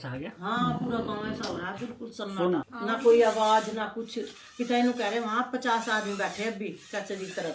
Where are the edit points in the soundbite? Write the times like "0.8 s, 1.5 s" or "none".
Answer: none